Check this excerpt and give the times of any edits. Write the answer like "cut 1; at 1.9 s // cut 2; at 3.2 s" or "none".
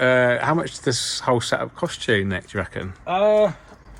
none